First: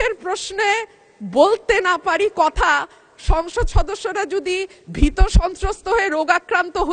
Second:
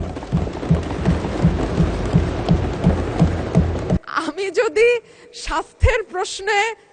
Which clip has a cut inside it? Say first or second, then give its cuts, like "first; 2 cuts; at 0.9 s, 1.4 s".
second; 1 cut; at 4.0 s